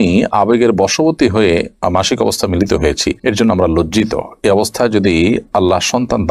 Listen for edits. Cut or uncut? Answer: uncut